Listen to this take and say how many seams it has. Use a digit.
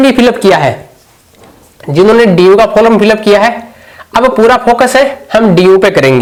0